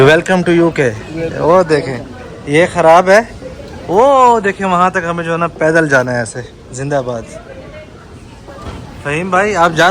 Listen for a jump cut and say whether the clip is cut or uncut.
uncut